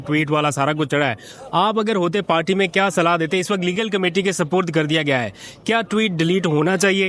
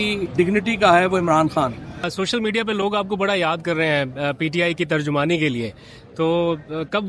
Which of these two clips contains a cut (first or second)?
second